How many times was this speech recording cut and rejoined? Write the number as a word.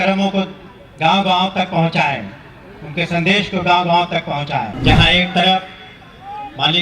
one